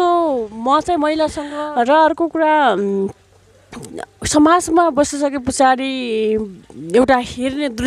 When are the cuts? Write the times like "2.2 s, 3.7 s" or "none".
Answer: 1.5 s